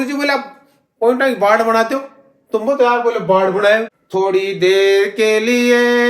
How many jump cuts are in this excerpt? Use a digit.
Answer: 1